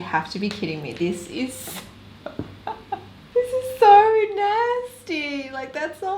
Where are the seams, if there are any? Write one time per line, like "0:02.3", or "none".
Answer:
0:03.2